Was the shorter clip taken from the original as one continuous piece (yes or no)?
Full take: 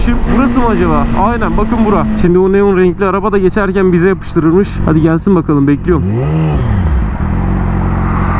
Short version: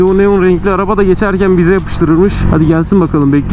yes